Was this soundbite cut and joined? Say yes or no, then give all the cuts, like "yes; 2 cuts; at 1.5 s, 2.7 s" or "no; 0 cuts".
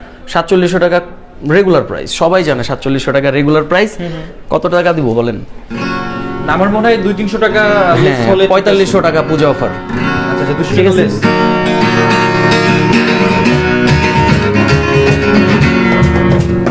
no; 0 cuts